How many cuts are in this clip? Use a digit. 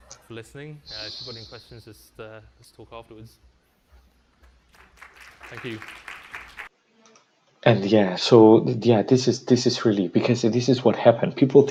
0